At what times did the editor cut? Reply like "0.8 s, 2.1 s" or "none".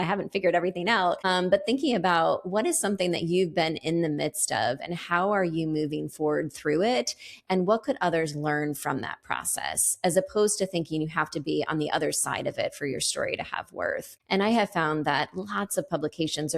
1.2 s, 14.1 s